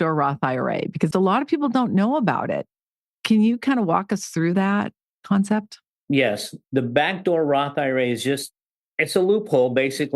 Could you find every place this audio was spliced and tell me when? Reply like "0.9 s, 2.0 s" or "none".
1.1 s